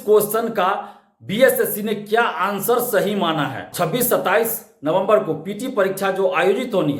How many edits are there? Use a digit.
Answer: 1